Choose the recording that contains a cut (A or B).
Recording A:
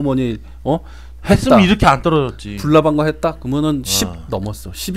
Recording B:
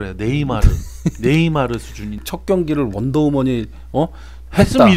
B